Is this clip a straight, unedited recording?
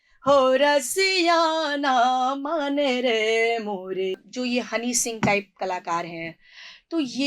no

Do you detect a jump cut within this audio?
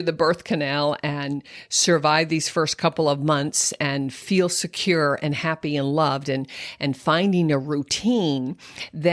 no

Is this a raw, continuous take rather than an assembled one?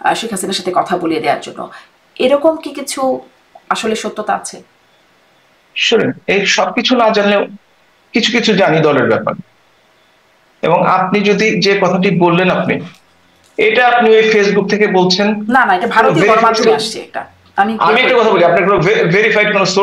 yes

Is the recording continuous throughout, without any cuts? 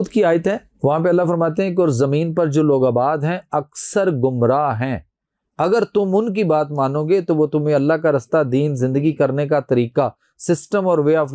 yes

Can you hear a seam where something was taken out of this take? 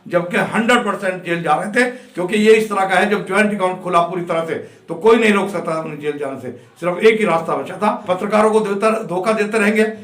yes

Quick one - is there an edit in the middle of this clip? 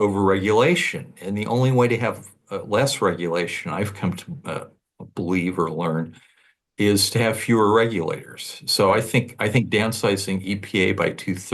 no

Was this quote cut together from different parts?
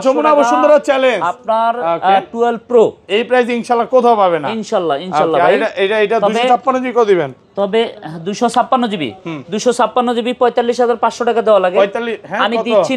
no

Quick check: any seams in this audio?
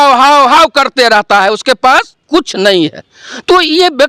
no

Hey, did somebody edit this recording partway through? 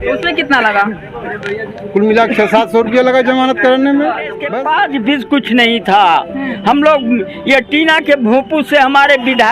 yes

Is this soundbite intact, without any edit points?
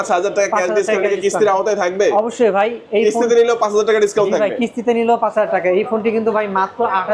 yes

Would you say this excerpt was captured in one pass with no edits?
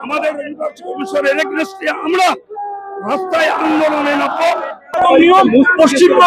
no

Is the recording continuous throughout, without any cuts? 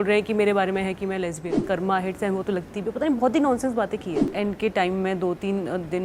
no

